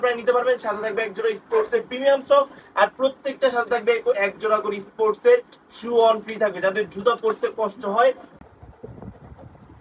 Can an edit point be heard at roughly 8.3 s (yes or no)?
yes